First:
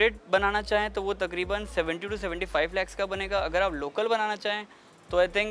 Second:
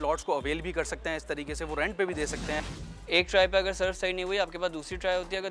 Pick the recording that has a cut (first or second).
second